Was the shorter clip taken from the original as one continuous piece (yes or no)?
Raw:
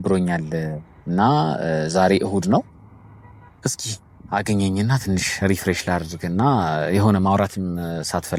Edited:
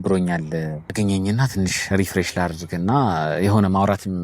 no